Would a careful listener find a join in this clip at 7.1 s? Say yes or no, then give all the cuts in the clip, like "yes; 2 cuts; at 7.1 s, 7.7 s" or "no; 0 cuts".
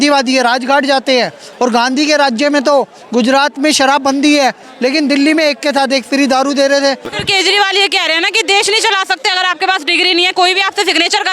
yes; 1 cut; at 7.1 s